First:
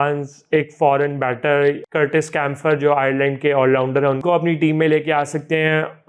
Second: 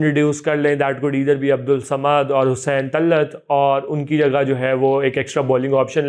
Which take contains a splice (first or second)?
first